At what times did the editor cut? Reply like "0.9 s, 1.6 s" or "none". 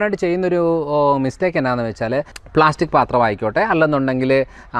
2.3 s